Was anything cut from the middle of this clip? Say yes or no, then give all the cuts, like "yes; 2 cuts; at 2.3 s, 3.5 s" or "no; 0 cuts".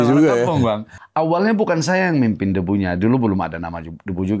yes; 1 cut; at 1.0 s